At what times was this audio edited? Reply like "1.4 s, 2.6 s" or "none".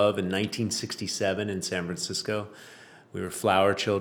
none